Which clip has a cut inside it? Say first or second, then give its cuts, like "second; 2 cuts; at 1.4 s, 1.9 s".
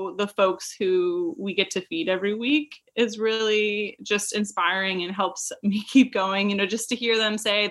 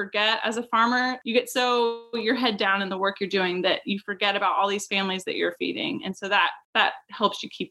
second; 2 cuts; at 1.2 s, 6.6 s